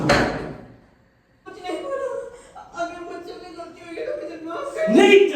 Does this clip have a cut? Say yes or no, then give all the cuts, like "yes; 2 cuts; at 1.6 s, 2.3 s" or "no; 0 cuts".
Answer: yes; 1 cut; at 1.4 s